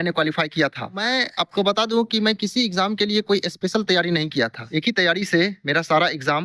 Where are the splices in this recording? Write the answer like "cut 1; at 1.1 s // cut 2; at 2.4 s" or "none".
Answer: cut 1; at 1.0 s // cut 2; at 4.6 s

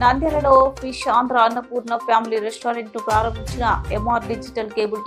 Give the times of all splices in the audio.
none

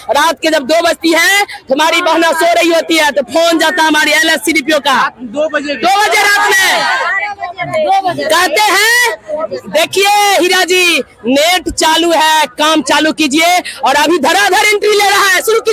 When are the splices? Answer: none

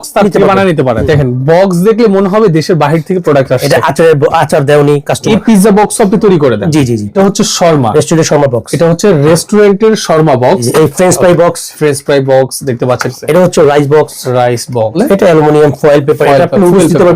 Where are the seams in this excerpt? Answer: cut 1; at 1.0 s // cut 2; at 5.2 s // cut 3; at 7.1 s // cut 4; at 10.6 s // cut 5; at 13.1 s // cut 6; at 15.0 s

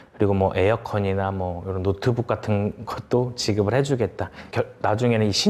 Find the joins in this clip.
cut 1; at 4.4 s

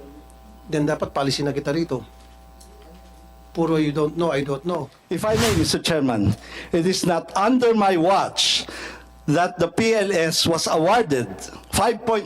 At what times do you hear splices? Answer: cut 1; at 5.0 s

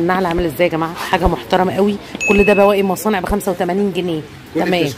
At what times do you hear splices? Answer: none

